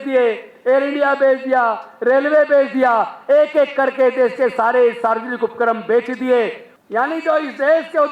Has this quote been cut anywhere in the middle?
yes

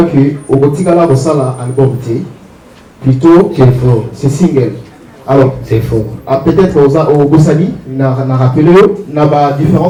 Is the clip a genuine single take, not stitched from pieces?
yes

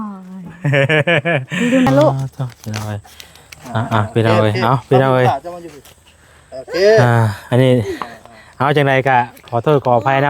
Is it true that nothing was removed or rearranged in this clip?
no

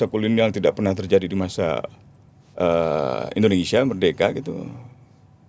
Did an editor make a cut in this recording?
no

